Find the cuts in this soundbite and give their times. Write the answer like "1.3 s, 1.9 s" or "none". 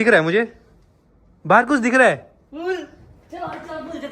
none